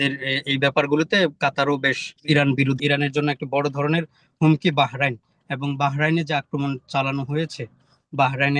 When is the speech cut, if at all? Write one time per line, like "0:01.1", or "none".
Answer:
0:02.1
0:02.8

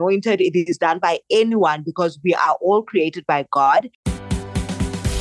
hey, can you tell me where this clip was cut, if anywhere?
0:03.9

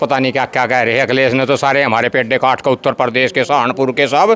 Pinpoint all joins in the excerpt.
none

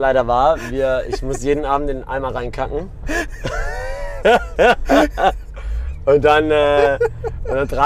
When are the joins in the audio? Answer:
none

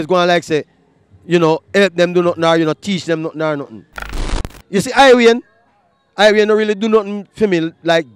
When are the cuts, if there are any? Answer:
0:04.2

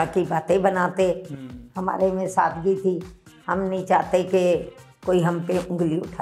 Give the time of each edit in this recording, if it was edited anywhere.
none

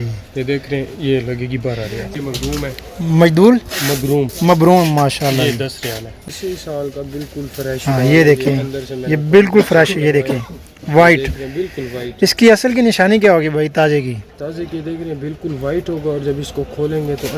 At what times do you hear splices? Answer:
0:02.1
0:06.2

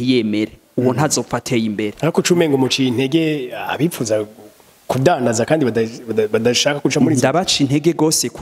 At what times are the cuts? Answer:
0:01.9

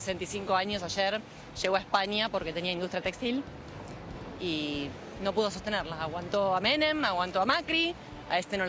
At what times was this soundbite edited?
none

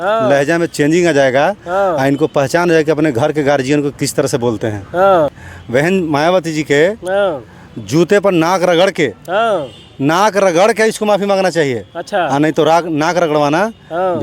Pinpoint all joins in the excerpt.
0:05.3

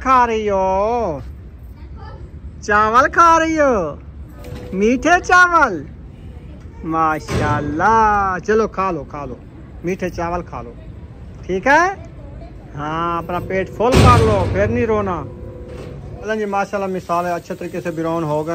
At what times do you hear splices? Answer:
none

